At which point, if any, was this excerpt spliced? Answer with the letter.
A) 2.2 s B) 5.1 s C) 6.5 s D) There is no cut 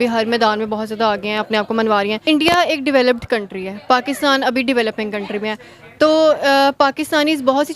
A